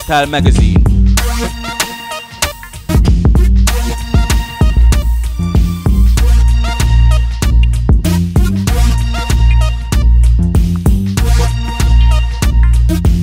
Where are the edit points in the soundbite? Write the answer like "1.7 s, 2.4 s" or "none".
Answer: none